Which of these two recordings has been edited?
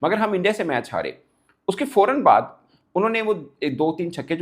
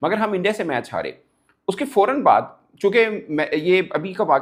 first; 1 cut; at 2.6 s

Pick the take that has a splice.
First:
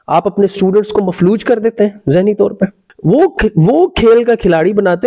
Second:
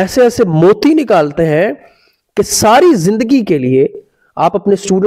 first; 1 cut; at 2.9 s

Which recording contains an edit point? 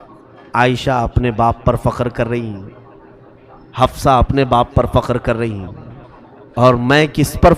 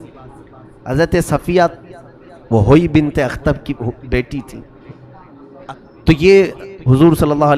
second; 1 cut; at 5.6 s

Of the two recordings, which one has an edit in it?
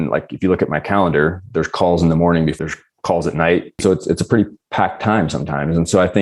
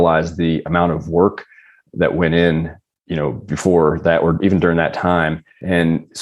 first; 2 cuts; at 2.6 s, 3.7 s

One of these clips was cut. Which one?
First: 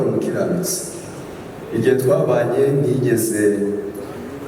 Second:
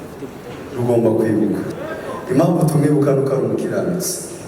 second; 1 cut; at 1.7 s

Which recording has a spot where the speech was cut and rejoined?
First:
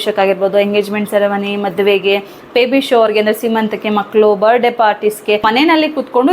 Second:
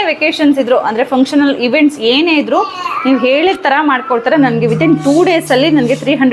first; 1 cut; at 5.4 s

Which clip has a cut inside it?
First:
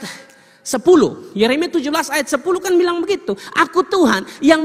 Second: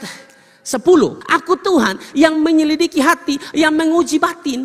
second; 1 cut; at 1.2 s

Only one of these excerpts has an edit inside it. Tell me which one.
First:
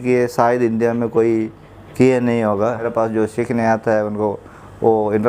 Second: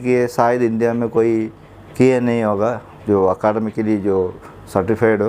first; 1 cut; at 2.9 s

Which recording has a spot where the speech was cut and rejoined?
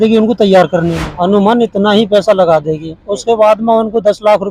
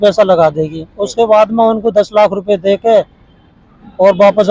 first; 1 cut; at 1.0 s

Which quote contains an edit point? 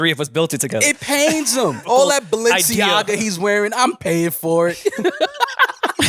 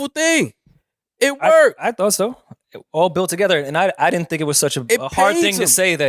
first; 1 cut; at 1.8 s

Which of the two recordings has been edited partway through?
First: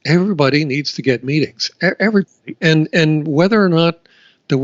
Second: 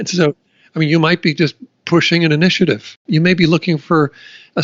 second; 1 cut; at 3.0 s

